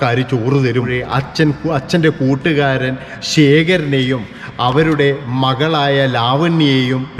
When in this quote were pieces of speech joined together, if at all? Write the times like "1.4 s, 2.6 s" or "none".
1.0 s

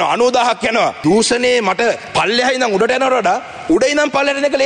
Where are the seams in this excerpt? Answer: 1.0 s, 2.0 s

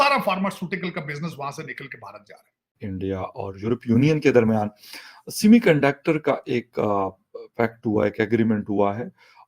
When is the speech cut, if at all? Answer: 2.6 s

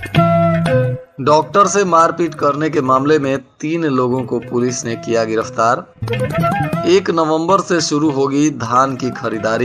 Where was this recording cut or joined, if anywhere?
1.0 s

